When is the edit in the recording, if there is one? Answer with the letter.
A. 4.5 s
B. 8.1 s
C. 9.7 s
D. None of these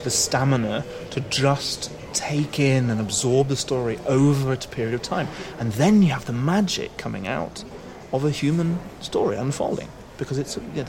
D